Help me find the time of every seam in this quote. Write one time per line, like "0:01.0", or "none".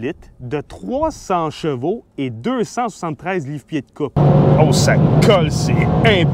0:04.2